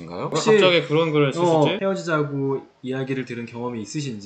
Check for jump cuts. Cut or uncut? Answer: cut